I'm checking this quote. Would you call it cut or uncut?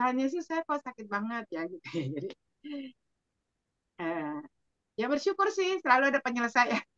uncut